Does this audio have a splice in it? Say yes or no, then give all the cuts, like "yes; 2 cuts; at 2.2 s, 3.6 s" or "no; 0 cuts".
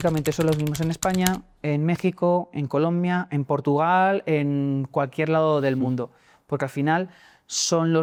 no; 0 cuts